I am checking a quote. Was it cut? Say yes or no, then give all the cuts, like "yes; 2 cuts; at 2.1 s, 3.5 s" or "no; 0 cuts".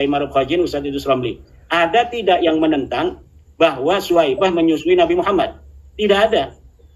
no; 0 cuts